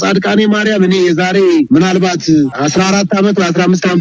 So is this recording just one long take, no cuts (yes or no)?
no